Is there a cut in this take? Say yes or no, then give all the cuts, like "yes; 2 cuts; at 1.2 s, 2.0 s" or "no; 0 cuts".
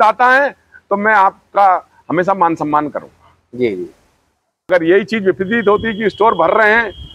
yes; 1 cut; at 4.7 s